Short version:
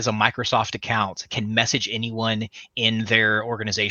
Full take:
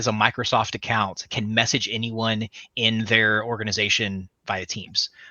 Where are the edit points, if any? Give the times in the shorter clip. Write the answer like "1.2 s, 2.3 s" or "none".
none